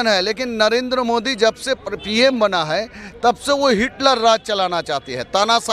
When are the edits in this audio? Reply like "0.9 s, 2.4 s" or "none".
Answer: none